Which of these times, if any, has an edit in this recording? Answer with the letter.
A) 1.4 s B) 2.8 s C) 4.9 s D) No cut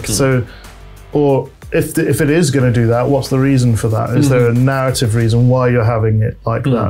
D